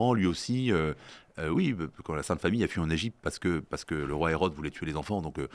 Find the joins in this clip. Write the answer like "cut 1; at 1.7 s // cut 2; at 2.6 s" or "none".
none